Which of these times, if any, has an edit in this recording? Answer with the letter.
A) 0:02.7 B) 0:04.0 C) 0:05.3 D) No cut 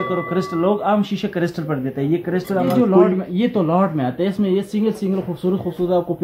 A